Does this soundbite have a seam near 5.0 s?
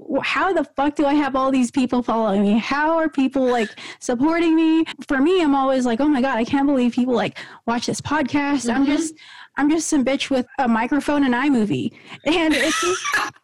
yes; 2 cuts; at 5.0 s, 10.5 s

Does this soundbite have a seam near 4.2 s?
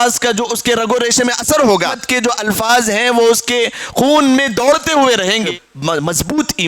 no; 2 cuts; at 2.3 s, 5.7 s

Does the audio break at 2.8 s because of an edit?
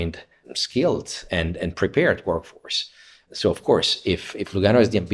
no; 0 cuts

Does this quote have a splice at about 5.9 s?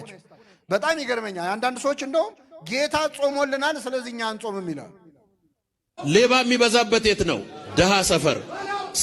yes; 1 cut; at 5.9 s

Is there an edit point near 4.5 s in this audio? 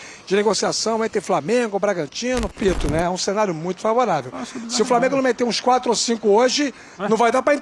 no; 1 cut; at 2.6 s

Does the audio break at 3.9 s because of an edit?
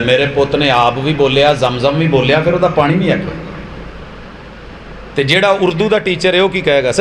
yes; 1 cut; at 3.9 s

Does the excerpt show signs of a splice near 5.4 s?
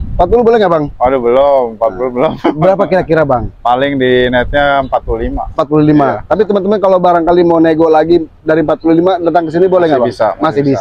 no; 0 cuts

